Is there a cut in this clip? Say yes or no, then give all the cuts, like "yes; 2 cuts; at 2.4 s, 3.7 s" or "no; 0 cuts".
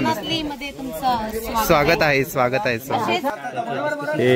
yes; 1 cut; at 3.3 s